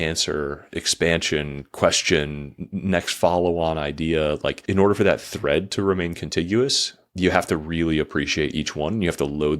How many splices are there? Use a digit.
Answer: 1